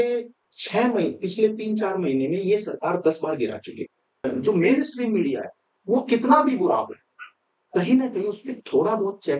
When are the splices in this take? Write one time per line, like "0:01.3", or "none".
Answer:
0:04.2